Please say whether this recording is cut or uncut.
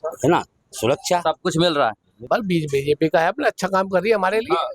cut